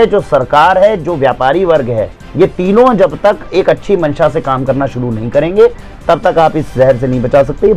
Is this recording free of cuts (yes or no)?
yes